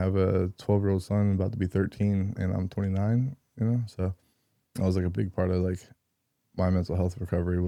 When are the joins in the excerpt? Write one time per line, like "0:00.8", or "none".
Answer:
none